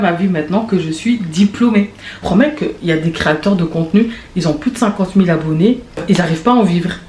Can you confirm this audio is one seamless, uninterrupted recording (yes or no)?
no